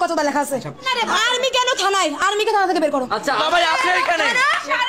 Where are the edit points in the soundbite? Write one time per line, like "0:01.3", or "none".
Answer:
0:00.8
0:03.4